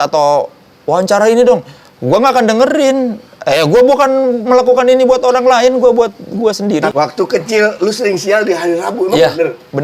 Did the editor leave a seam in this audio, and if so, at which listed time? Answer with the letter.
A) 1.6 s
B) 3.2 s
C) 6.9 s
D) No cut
C